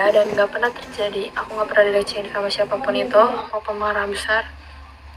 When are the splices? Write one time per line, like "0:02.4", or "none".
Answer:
0:03.5